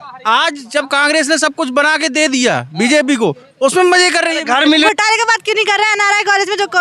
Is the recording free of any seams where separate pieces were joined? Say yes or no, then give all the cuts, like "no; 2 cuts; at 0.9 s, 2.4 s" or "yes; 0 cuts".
no; 1 cut; at 4.8 s